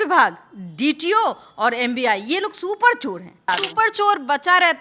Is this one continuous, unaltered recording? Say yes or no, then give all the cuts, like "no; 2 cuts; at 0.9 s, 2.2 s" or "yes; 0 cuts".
no; 1 cut; at 3.5 s